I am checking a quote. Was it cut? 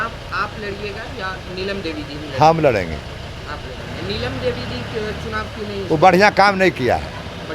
no; 0 cuts

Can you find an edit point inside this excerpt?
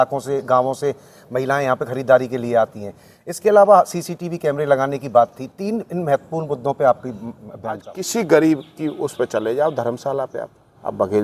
yes; 1 cut; at 7.9 s

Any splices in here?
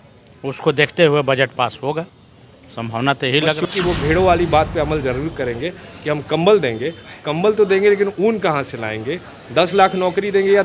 yes; 1 cut; at 3.7 s

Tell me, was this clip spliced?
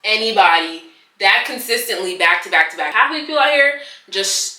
yes; 1 cut; at 2.9 s

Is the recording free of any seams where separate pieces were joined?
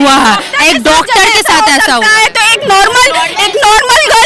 yes; 0 cuts

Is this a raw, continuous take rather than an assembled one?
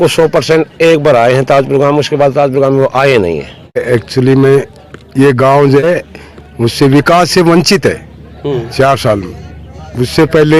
no; 2 cuts; at 3.8 s, 5.8 s

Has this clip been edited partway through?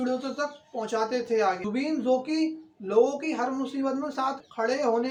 no; 0 cuts

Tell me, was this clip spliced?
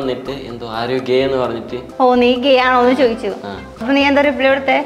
yes; 2 cuts; at 1.8 s, 3.9 s

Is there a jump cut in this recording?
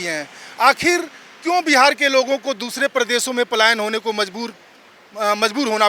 no; 0 cuts

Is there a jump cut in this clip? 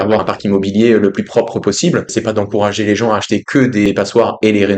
no; 0 cuts

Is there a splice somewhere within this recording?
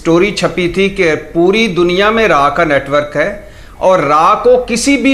no; 0 cuts

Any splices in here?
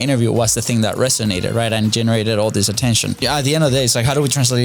yes; 1 cut; at 3.2 s

